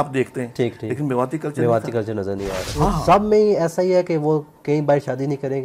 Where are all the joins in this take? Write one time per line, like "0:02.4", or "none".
0:02.6